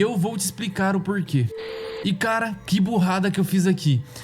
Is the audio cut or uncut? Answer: cut